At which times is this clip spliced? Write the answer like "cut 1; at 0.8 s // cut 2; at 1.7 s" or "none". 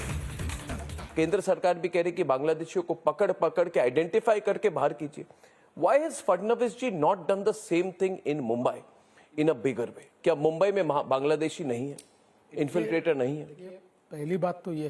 cut 1; at 1.0 s

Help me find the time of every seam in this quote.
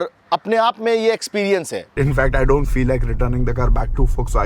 cut 1; at 1.9 s

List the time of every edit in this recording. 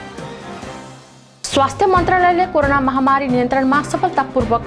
cut 1; at 1.2 s

